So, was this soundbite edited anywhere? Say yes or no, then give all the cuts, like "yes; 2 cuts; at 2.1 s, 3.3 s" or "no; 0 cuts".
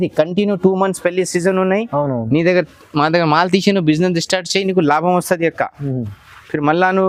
no; 0 cuts